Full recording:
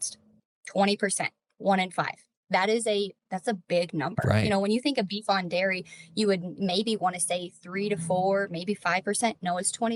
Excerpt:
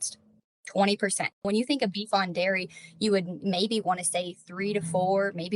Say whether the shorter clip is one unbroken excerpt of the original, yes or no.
no